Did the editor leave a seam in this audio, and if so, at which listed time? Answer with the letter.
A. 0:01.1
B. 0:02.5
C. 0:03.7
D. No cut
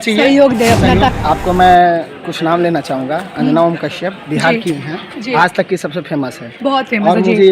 A